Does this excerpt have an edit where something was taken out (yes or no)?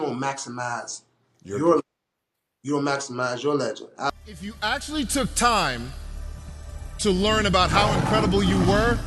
yes